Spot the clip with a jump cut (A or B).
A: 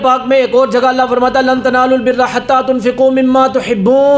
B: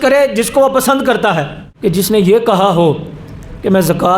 B